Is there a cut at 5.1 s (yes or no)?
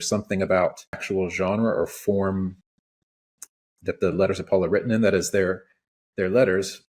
no